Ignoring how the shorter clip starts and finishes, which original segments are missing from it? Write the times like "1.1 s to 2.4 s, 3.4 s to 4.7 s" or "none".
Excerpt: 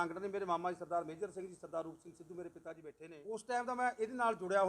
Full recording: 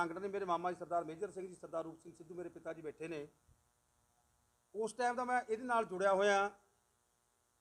2.9 s to 4.4 s